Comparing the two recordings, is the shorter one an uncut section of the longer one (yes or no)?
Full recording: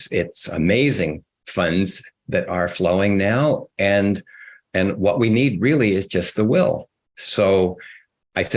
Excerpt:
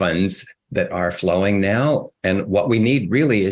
no